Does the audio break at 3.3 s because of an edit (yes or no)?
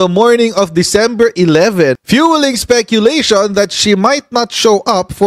no